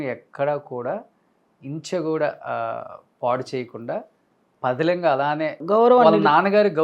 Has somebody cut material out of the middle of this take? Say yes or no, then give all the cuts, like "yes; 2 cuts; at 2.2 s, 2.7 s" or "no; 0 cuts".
no; 0 cuts